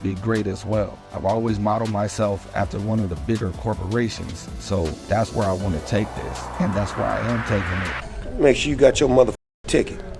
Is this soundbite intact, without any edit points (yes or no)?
no